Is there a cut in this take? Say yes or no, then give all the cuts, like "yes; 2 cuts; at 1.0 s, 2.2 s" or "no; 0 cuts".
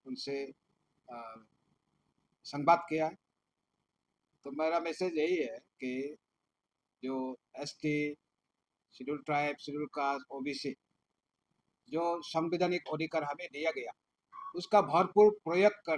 no; 0 cuts